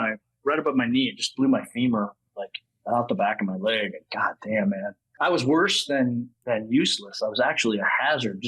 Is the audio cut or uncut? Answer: cut